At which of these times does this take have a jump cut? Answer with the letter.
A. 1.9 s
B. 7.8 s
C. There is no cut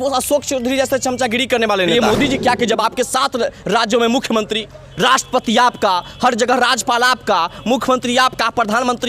A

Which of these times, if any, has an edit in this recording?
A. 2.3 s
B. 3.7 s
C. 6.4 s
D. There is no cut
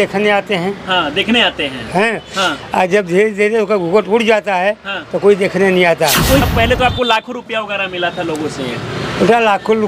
C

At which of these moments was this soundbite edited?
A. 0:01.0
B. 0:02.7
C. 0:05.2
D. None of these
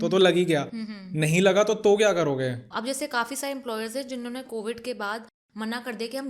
B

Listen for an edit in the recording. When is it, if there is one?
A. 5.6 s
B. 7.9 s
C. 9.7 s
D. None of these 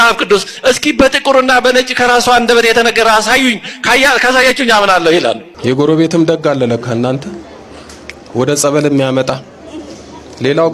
A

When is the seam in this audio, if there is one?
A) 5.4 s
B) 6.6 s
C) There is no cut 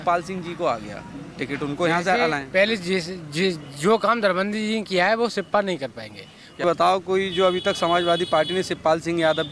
B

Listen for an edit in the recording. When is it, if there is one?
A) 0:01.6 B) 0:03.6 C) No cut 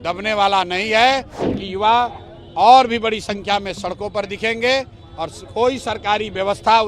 A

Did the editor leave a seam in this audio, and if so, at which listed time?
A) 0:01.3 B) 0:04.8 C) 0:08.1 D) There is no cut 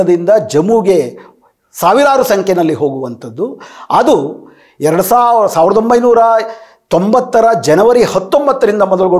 D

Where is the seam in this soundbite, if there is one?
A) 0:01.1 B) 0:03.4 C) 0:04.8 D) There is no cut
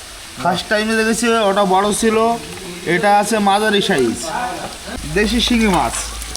C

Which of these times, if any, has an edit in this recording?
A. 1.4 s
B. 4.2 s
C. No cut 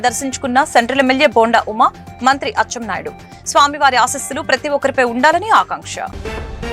C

